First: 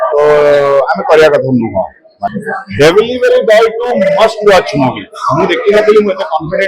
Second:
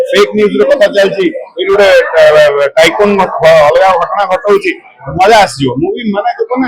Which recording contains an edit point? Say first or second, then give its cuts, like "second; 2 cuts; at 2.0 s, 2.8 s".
first; 1 cut; at 2.2 s